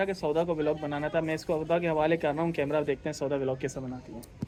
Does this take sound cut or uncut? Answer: uncut